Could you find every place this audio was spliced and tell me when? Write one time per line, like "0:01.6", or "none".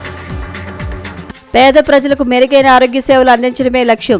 0:00.9